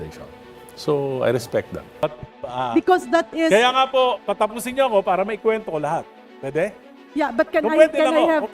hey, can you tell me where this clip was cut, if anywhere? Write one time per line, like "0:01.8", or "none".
0:01.8